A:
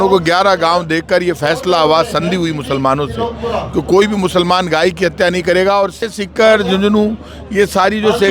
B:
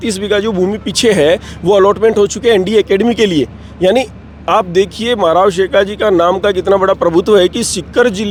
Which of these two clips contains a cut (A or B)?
A